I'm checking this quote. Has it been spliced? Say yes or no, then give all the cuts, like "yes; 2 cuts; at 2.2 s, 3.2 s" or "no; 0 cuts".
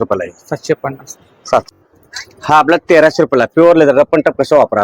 yes; 1 cut; at 1.7 s